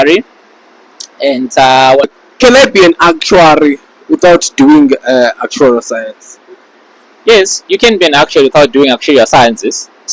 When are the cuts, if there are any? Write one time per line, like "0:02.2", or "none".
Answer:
0:02.2